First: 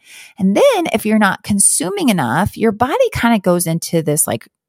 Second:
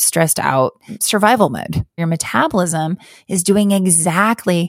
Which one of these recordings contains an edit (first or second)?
second